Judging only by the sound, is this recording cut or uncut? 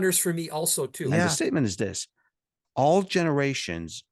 cut